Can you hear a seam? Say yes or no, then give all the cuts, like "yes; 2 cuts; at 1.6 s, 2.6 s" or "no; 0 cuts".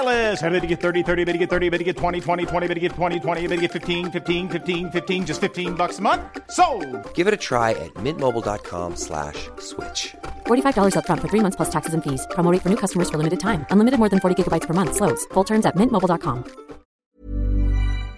yes; 1 cut; at 17.0 s